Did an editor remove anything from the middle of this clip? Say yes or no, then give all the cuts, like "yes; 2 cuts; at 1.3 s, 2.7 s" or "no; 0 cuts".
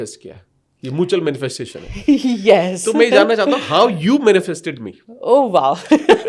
no; 0 cuts